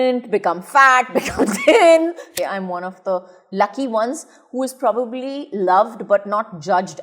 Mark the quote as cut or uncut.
cut